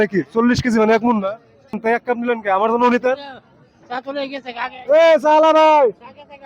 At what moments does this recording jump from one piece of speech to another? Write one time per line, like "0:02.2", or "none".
0:01.8